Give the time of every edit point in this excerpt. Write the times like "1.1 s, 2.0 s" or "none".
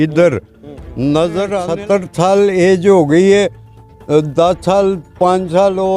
1.6 s